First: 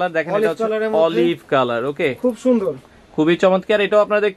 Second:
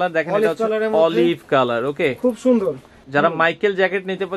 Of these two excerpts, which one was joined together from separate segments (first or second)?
second